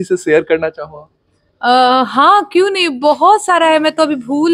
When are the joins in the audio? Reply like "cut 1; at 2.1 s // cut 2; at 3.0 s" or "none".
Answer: none

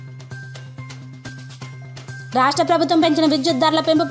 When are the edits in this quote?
cut 1; at 2.3 s

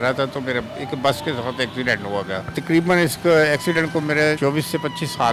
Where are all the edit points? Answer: cut 1; at 2.5 s // cut 2; at 4.4 s

